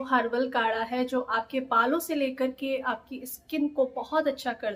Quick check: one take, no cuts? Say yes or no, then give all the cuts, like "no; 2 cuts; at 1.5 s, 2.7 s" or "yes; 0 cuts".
yes; 0 cuts